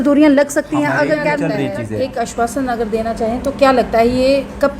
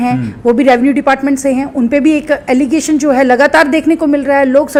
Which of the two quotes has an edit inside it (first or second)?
first